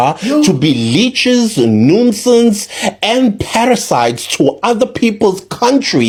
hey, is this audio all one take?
yes; 0 cuts

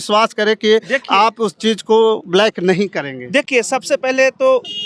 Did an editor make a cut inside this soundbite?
no; 0 cuts

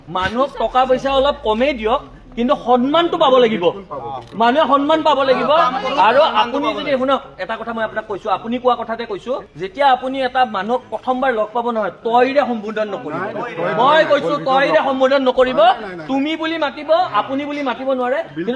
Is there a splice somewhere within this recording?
no; 0 cuts

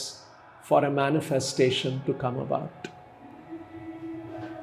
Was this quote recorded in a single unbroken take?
yes; 0 cuts

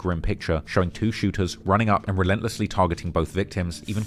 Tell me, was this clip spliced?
no; 0 cuts

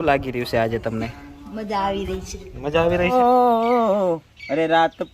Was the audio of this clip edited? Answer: yes; 1 cut; at 3.1 s

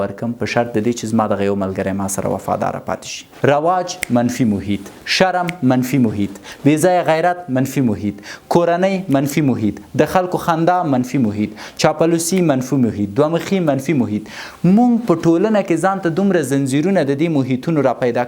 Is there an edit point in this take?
yes; 1 cut; at 3.3 s

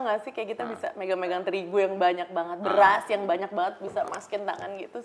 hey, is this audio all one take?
yes; 0 cuts

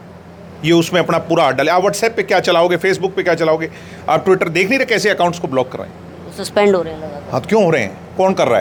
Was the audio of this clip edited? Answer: no; 0 cuts

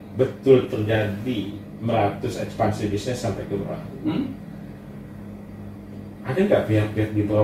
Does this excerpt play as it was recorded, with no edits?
yes; 0 cuts

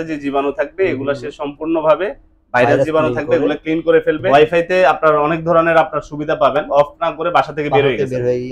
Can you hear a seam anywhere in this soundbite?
yes; 2 cuts; at 4.2 s, 6.7 s

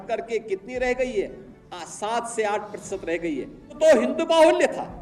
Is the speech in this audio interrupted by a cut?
yes; 1 cut; at 3.8 s

